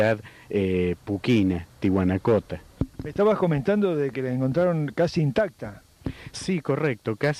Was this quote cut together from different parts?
no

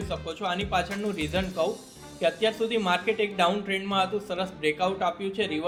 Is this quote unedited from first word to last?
yes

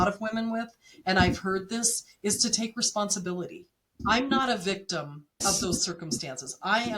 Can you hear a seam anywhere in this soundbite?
yes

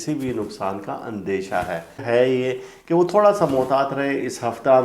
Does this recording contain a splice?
yes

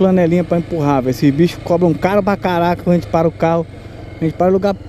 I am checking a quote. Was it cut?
no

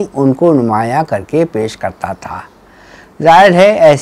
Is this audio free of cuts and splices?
yes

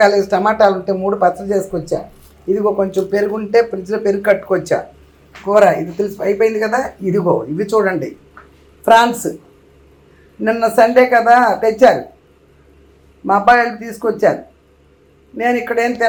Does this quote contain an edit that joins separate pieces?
no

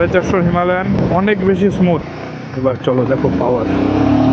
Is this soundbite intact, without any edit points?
no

